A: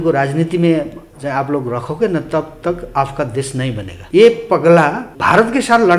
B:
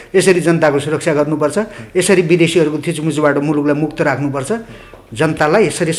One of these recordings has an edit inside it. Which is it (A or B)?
A